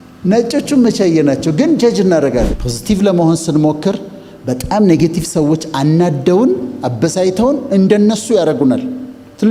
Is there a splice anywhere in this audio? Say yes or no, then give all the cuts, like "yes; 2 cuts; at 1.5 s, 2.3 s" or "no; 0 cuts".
yes; 1 cut; at 2.5 s